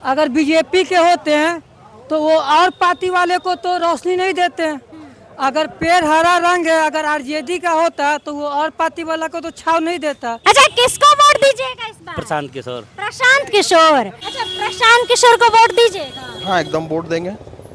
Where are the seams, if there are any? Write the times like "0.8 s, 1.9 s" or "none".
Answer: 10.4 s, 14.2 s